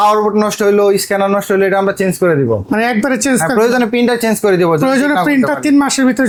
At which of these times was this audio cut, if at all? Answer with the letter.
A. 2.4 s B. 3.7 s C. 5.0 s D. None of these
D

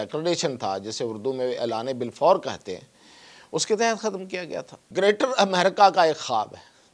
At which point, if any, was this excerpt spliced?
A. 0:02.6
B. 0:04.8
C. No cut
B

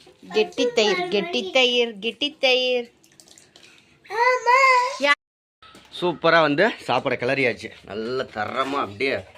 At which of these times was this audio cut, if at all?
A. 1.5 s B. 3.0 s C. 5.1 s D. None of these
C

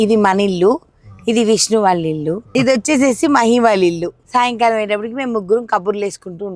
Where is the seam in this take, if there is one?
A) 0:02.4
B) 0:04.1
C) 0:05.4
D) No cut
B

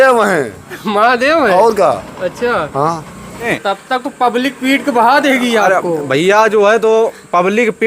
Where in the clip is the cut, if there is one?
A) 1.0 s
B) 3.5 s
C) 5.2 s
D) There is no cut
B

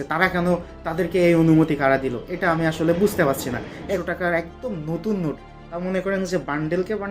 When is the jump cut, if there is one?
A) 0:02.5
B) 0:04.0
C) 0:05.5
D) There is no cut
B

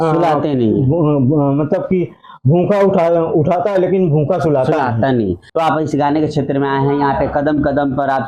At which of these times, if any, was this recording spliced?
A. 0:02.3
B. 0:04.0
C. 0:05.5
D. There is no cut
C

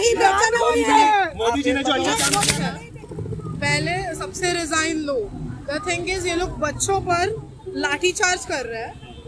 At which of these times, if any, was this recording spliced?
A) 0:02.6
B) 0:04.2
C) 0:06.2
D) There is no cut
A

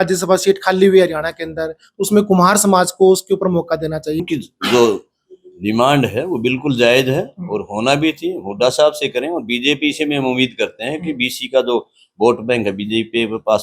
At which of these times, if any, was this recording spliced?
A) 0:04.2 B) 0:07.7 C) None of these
A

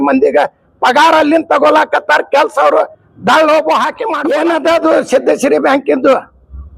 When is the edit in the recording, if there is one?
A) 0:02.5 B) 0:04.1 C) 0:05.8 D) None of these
B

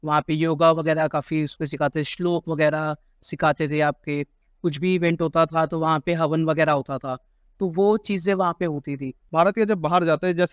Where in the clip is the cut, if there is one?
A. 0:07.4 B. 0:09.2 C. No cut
B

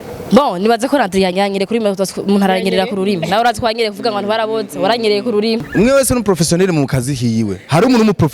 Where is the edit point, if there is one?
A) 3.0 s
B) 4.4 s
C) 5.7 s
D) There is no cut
C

